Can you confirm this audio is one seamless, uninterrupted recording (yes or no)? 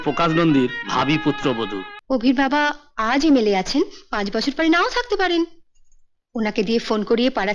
no